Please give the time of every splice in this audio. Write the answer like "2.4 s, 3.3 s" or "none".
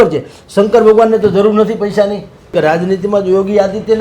2.5 s